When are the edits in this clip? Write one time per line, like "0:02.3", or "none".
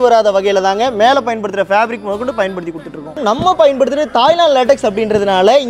0:03.2